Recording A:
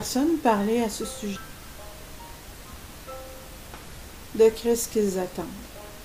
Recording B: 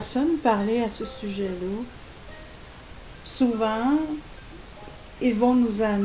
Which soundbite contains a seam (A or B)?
B